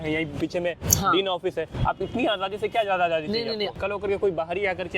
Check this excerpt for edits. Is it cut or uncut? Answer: cut